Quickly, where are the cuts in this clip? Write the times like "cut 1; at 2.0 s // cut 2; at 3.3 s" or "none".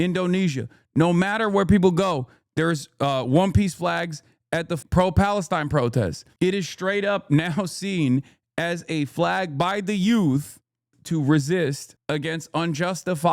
cut 1; at 4.8 s // cut 2; at 6.2 s // cut 3; at 11.0 s // cut 4; at 11.9 s